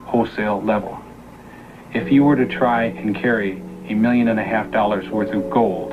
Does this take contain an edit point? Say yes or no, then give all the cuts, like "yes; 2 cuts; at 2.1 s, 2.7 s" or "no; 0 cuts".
no; 0 cuts